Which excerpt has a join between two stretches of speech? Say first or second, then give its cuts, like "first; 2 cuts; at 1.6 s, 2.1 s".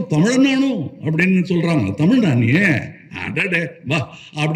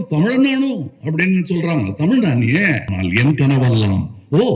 second; 1 cut; at 2.9 s